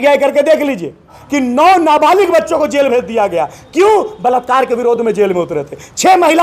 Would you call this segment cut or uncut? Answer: cut